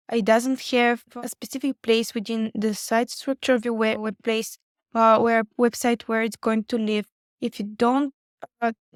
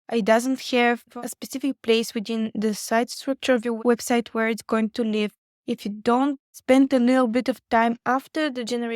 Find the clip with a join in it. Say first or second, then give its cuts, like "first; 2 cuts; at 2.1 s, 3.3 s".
second; 2 cuts; at 3.8 s, 6.5 s